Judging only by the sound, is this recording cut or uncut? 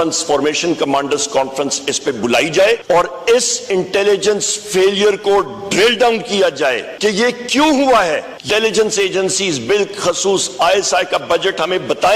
cut